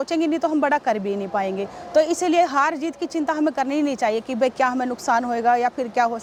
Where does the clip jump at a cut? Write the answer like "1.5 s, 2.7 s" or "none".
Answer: none